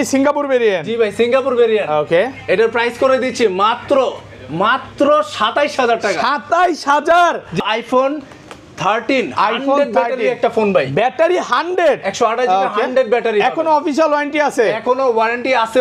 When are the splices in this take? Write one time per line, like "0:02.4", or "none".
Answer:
0:07.6